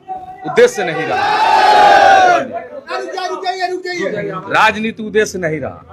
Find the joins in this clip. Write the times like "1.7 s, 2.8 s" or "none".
1.2 s